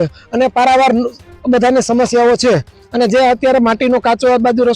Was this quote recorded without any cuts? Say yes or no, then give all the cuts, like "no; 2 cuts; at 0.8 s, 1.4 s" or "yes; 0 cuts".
yes; 0 cuts